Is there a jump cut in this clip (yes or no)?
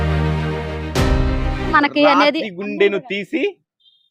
yes